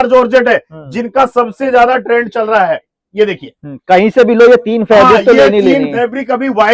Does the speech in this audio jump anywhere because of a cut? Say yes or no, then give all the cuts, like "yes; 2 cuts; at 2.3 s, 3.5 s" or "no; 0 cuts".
no; 0 cuts